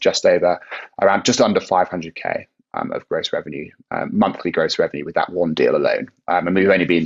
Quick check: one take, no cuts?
yes; 0 cuts

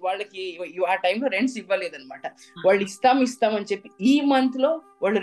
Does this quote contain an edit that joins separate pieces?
no; 0 cuts

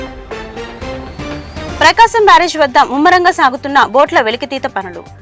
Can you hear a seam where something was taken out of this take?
yes; 1 cut; at 1.8 s

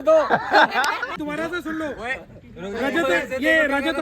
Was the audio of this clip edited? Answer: yes; 1 cut; at 1.1 s

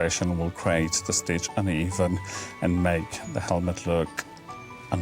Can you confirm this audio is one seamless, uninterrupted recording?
yes; 0 cuts

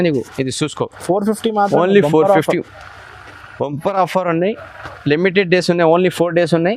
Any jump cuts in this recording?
no; 0 cuts

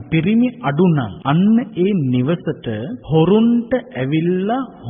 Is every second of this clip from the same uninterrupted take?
no; 2 cuts; at 1.1 s, 2.9 s

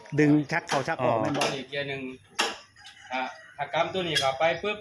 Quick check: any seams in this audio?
yes; 1 cut; at 1.2 s

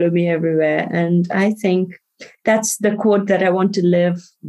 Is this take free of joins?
yes; 0 cuts

